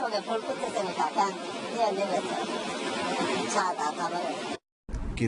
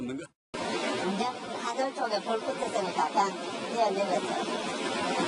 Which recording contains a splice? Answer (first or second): second